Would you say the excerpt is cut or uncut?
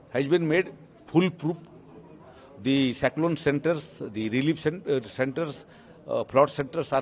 uncut